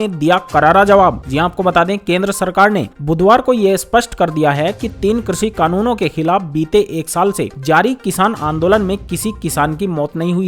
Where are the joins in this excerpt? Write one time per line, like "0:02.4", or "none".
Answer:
none